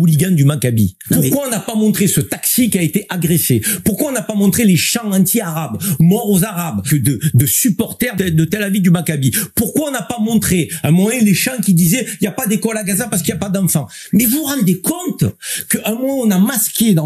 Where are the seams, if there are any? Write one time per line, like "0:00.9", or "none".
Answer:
0:01.0
0:06.8
0:08.1